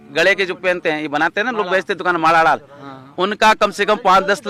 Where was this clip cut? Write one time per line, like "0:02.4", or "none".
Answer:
none